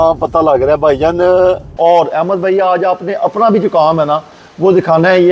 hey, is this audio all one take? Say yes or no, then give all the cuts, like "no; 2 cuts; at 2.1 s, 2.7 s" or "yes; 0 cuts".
no; 1 cut; at 1.7 s